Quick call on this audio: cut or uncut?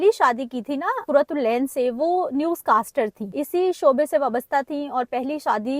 cut